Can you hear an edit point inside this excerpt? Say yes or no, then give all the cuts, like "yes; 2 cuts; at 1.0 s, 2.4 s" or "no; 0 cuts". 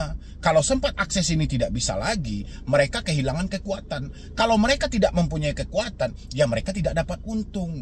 no; 0 cuts